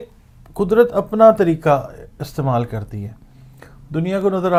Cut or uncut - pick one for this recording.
uncut